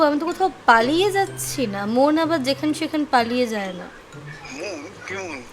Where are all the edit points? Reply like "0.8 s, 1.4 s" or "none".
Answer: none